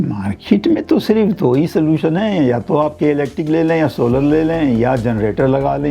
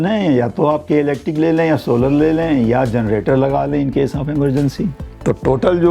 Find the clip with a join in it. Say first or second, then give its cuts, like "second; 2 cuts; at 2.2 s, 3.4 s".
second; 1 cut; at 4.9 s